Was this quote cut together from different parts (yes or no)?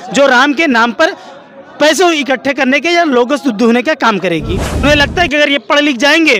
yes